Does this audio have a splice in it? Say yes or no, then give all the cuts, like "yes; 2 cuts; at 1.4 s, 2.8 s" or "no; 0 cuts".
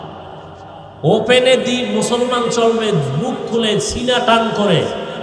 yes; 1 cut; at 0.9 s